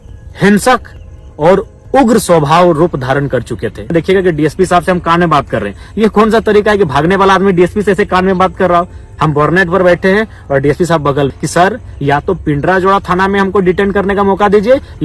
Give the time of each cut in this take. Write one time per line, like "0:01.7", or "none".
0:03.9
0:11.3